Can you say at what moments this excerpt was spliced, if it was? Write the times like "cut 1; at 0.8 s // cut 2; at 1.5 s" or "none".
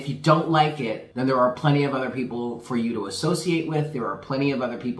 cut 1; at 1.0 s